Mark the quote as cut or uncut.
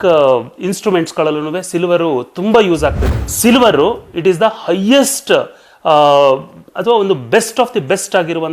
cut